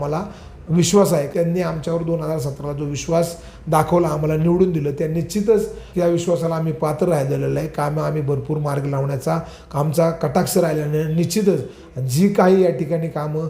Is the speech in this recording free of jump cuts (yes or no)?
no